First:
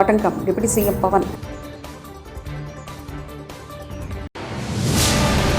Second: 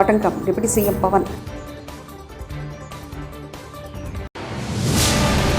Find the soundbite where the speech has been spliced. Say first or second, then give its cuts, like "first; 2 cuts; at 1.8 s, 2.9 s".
second; 2 cuts; at 1.6 s, 4.3 s